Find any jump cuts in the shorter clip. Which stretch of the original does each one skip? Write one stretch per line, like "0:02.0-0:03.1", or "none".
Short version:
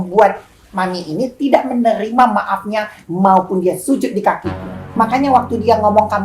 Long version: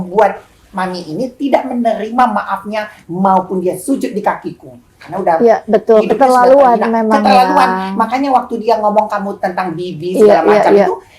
0:04.9-0:07.9